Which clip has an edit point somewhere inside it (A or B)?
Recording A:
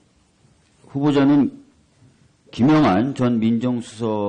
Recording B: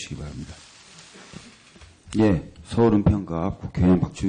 A